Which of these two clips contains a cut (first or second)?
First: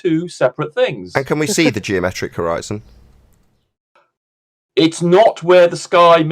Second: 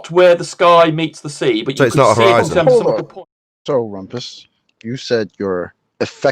second